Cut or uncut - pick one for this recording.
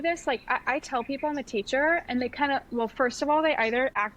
uncut